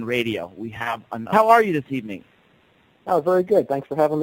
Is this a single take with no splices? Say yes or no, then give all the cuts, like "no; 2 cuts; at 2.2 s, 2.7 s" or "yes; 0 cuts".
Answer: yes; 0 cuts